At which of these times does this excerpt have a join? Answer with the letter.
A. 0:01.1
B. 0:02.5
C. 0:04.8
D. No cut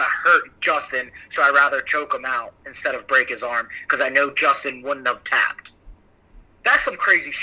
D